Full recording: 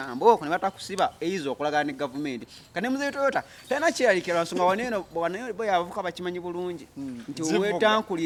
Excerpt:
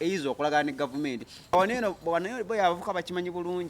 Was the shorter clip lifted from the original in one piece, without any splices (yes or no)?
no